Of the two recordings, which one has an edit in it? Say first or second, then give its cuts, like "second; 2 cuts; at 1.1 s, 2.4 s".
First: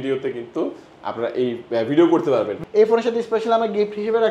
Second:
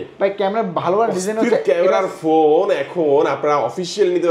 first; 1 cut; at 2.6 s